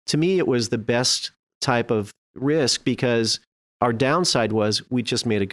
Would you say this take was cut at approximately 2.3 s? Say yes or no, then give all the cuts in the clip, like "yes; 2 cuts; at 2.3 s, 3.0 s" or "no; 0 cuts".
yes; 1 cut; at 2.3 s